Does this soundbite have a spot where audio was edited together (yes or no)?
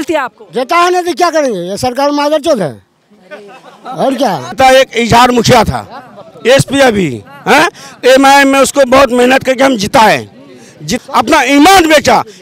yes